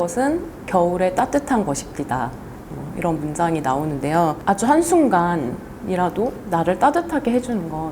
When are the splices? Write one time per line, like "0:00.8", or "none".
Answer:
0:04.4